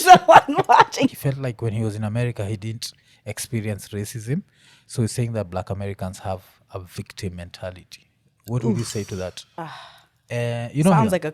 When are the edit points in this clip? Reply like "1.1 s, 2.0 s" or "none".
1.1 s, 9.4 s